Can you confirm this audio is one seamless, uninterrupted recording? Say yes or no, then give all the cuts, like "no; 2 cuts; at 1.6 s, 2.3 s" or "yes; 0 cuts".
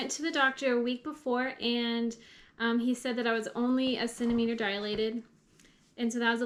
yes; 0 cuts